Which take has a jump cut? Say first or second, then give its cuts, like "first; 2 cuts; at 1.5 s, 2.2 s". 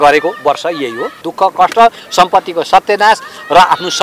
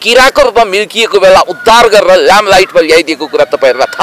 first; 1 cut; at 1.2 s